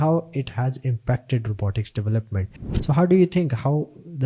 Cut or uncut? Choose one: cut